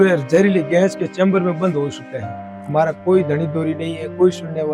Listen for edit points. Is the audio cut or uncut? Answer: uncut